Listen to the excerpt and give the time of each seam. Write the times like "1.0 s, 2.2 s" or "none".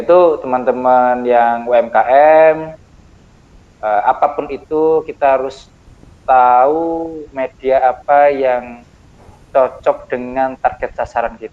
none